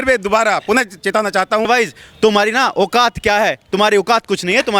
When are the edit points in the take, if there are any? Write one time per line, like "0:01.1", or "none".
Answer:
0:01.7